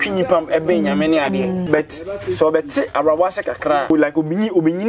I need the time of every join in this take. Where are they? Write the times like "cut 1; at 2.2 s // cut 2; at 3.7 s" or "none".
cut 1; at 1.6 s // cut 2; at 3.9 s

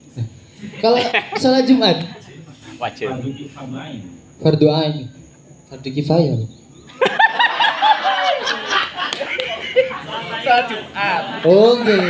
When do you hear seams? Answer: none

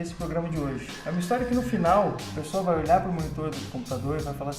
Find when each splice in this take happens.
cut 1; at 1.4 s

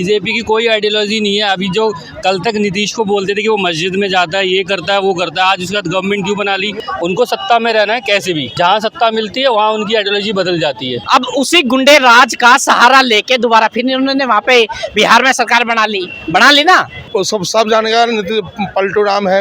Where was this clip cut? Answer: cut 1; at 6.8 s // cut 2; at 8.5 s // cut 3; at 11.0 s // cut 4; at 17.0 s

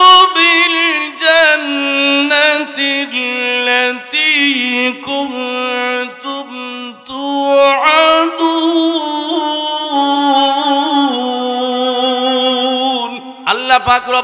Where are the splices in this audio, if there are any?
cut 1; at 13.3 s

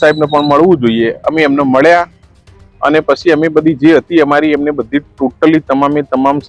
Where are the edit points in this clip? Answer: none

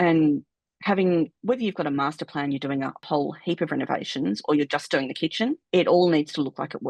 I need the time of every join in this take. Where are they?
cut 1; at 3.0 s // cut 2; at 5.6 s

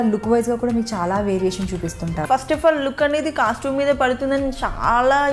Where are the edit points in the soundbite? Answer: cut 1; at 2.2 s

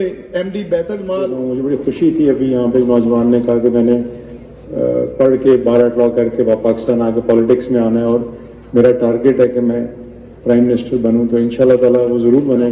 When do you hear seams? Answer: cut 1; at 1.4 s

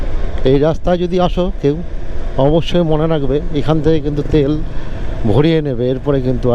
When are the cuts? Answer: none

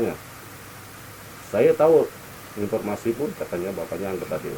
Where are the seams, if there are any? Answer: none

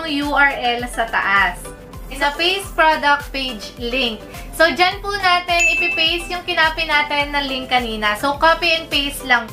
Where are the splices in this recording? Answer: cut 1; at 2.1 s

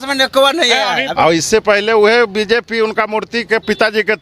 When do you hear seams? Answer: cut 1; at 1.1 s

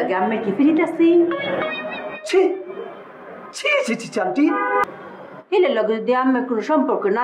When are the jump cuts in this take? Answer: cut 1; at 4.9 s

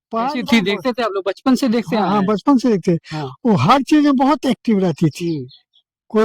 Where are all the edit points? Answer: none

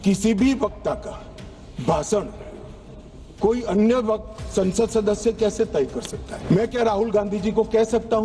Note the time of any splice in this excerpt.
cut 1; at 6.3 s

